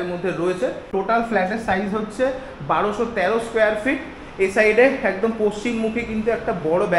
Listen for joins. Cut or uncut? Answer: cut